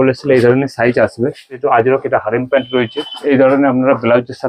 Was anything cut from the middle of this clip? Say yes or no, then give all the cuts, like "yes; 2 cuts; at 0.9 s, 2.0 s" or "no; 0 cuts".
yes; 2 cuts; at 1.6 s, 3.1 s